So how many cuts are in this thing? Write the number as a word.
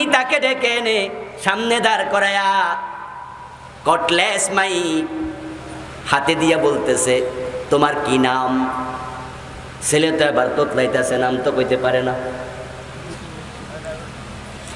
one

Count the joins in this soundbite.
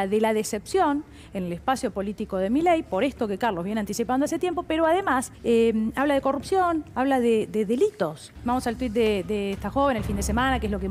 two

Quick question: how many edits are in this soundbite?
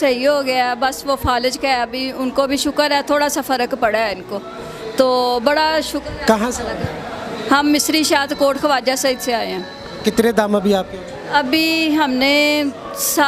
zero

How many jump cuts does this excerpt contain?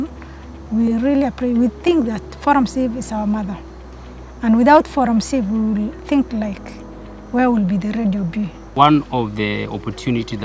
one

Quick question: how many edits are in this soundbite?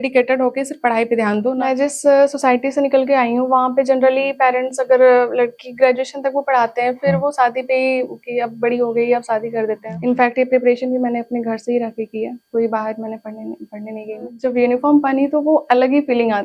three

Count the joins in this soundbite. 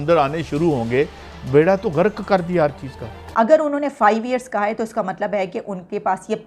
one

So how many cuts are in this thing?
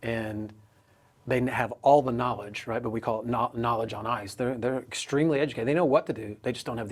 zero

